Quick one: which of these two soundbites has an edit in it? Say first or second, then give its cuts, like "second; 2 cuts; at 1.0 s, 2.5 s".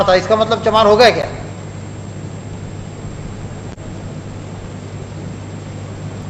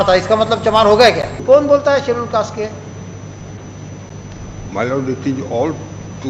second; 1 cut; at 1.4 s